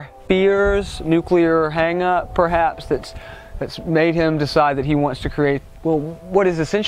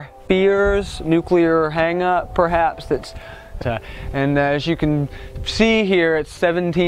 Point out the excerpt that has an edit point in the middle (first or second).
first